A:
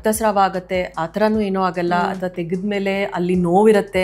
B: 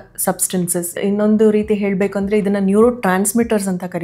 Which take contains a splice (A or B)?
B